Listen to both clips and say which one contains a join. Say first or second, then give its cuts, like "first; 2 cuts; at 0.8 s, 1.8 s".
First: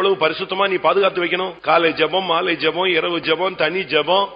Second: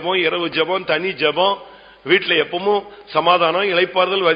first; 1 cut; at 1.5 s